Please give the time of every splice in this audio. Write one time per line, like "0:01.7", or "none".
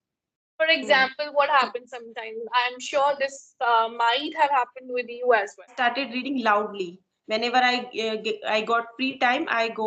0:05.7

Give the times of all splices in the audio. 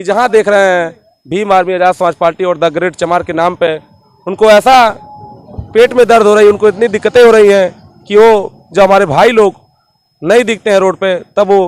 none

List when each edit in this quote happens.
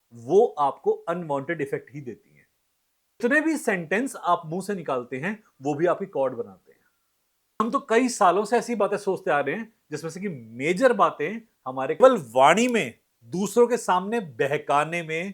0:03.2
0:07.6
0:12.0

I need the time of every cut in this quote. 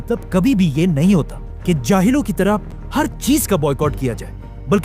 0:02.8

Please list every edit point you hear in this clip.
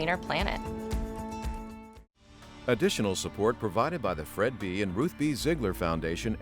0:02.5

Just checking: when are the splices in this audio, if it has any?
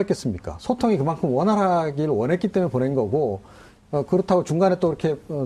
0:03.1

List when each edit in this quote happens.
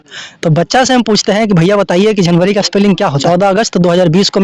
0:03.2

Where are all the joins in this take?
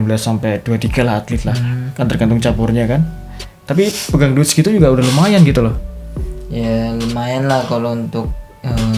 none

